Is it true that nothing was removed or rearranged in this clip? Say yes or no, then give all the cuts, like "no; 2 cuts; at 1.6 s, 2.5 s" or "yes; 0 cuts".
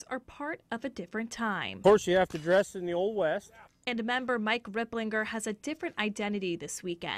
no; 1 cut; at 3.1 s